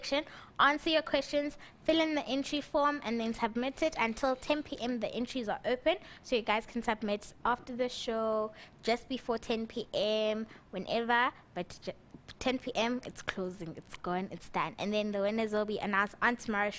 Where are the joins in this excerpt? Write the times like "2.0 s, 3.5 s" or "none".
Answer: 4.9 s